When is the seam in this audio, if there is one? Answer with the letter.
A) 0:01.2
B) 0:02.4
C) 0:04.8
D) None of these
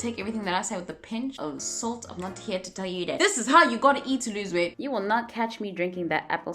C